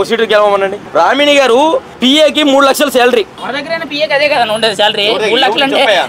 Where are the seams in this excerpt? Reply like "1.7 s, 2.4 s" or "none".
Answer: 0.8 s, 1.9 s, 3.4 s